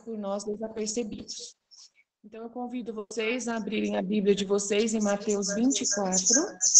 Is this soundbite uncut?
yes; 0 cuts

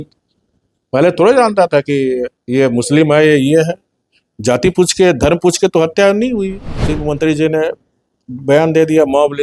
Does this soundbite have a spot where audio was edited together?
yes; 1 cut; at 6.9 s

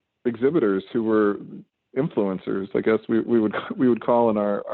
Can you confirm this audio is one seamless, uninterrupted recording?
yes; 0 cuts

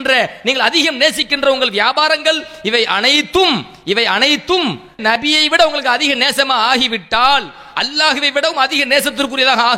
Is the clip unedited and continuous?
no; 1 cut; at 5.0 s

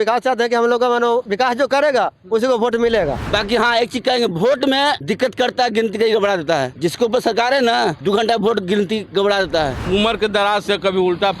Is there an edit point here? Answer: yes; 6 cuts; at 1.3 s, 2.9 s, 5.0 s, 6.7 s, 8.0 s, 9.8 s

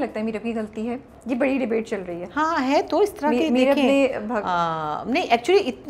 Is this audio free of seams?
yes; 0 cuts

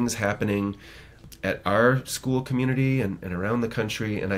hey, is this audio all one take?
no; 1 cut; at 1.2 s

